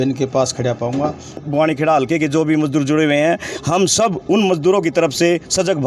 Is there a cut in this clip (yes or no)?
yes